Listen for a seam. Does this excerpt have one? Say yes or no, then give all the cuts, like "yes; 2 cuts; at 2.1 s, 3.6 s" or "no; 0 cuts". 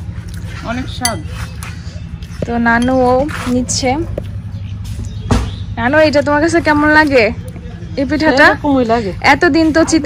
no; 0 cuts